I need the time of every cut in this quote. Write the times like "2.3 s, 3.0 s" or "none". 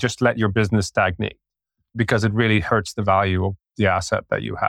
3.7 s

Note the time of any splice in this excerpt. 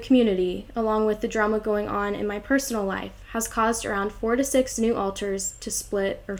none

